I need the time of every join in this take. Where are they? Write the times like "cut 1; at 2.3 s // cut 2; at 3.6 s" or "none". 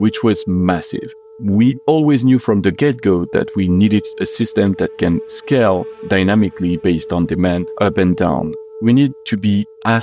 cut 1; at 1.2 s // cut 2; at 7.7 s // cut 3; at 8.6 s